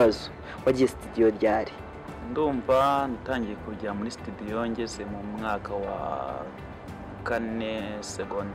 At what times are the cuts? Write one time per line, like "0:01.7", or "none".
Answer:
none